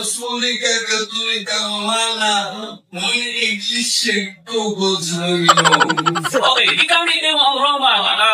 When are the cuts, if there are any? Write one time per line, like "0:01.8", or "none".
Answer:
0:01.7